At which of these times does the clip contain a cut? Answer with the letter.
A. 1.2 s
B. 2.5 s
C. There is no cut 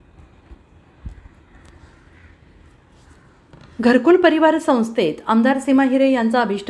A